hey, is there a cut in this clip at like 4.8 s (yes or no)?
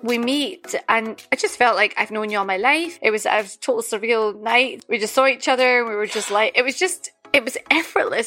yes